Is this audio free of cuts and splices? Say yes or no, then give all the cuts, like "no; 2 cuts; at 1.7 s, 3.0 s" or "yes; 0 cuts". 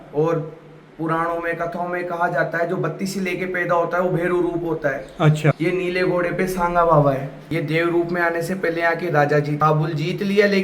no; 3 cuts; at 5.6 s, 7.3 s, 9.6 s